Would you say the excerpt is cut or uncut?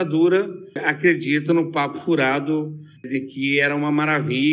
cut